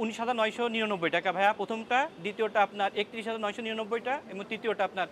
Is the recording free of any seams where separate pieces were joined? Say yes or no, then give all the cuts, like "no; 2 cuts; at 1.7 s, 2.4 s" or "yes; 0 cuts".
yes; 0 cuts